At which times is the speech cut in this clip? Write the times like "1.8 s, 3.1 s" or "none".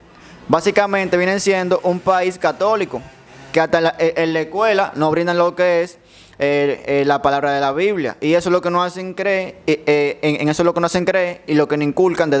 none